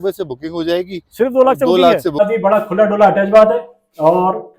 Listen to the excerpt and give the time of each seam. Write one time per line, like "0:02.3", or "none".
0:02.2